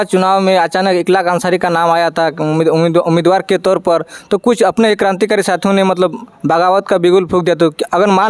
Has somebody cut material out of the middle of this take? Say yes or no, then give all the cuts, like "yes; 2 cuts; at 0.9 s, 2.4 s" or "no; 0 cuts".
no; 0 cuts